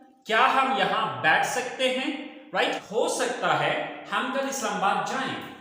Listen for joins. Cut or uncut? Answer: cut